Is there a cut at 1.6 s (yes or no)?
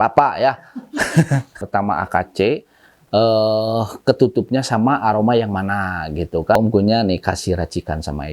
yes